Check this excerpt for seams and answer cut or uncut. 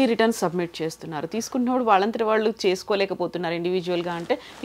uncut